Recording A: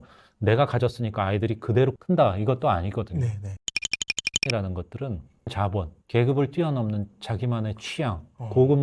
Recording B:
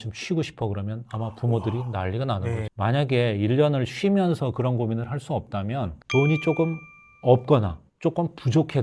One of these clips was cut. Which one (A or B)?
B